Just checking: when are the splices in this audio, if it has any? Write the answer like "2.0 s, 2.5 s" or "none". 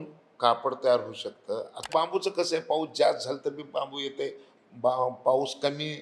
1.8 s